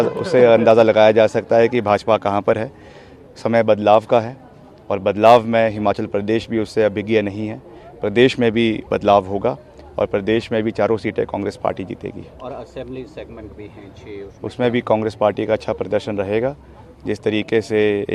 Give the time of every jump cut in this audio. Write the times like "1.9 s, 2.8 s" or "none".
none